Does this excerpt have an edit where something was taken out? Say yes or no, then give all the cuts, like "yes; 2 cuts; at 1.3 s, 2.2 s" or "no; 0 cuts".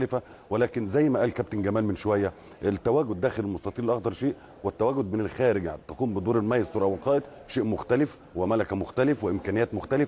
yes; 1 cut; at 6.4 s